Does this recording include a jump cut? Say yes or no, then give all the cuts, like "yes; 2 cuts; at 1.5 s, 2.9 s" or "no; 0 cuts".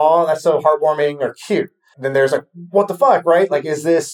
yes; 1 cut; at 1.9 s